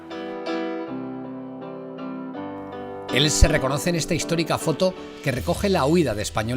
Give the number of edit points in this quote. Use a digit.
1